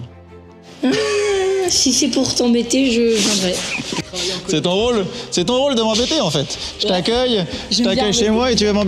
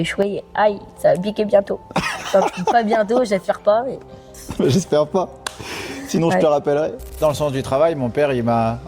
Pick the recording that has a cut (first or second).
second